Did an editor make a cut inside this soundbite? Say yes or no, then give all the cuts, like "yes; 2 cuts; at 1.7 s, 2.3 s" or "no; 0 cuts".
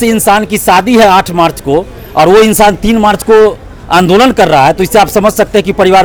no; 0 cuts